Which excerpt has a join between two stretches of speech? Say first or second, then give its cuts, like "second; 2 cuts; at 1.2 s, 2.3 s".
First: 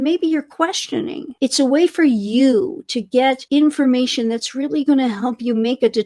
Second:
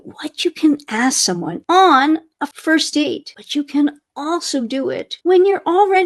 second; 2 cuts; at 1.5 s, 2.8 s